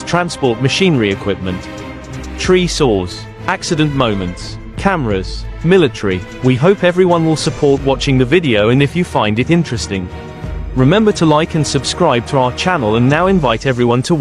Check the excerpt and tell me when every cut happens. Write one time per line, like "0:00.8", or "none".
none